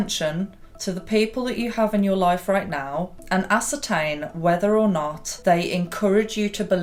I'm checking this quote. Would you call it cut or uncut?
uncut